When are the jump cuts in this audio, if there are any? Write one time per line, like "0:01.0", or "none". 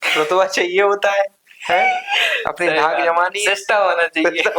none